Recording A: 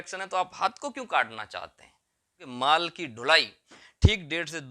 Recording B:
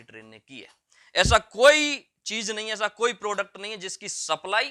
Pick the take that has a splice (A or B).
A